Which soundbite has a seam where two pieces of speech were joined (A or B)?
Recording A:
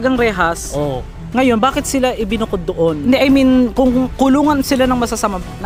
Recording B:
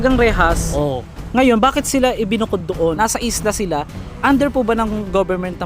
B